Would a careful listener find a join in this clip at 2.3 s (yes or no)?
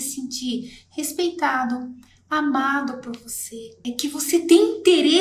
no